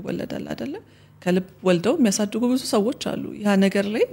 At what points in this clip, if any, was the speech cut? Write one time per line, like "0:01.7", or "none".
none